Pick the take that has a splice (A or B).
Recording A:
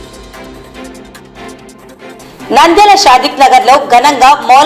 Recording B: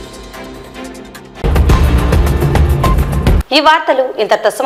A